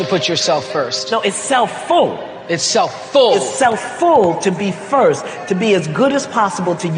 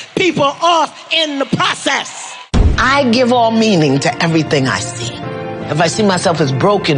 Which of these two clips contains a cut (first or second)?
second